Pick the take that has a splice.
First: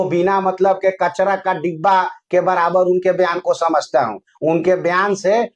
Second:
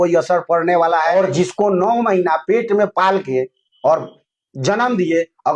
second; 1 cut; at 1.1 s

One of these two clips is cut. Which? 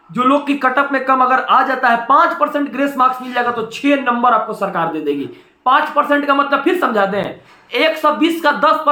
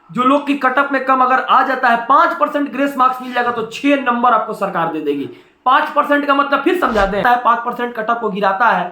second; 1 cut; at 7.2 s

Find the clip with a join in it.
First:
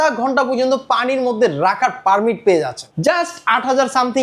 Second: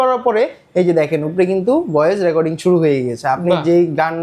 first; 1 cut; at 2.8 s

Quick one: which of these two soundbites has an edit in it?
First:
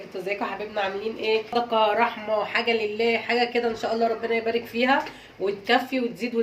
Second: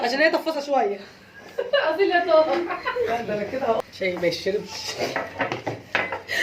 second; 1 cut; at 3.4 s

